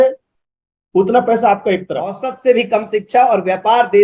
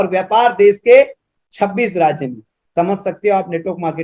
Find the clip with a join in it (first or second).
first